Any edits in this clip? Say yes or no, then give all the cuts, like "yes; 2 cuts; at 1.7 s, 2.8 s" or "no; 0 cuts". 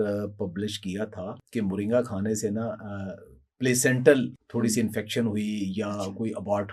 yes; 2 cuts; at 1.4 s, 4.4 s